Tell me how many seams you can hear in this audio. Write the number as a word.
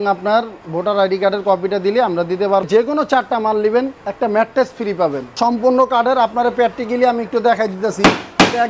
two